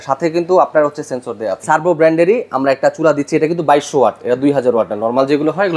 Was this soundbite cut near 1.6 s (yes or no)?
yes